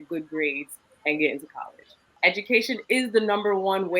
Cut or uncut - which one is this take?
cut